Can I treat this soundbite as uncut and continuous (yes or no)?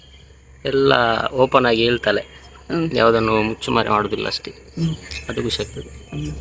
yes